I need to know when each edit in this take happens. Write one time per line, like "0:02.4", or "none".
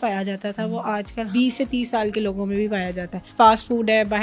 0:01.3
0:03.2